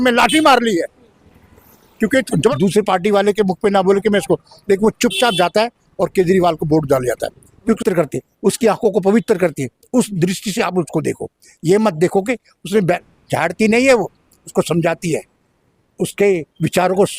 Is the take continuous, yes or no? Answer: no